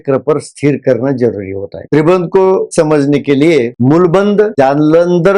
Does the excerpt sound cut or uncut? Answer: cut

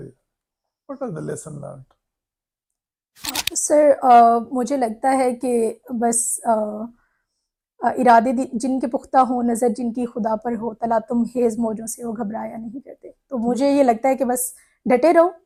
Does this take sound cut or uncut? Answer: uncut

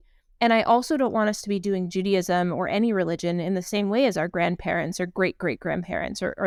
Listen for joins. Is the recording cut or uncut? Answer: uncut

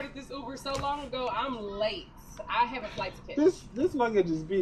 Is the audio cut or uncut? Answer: uncut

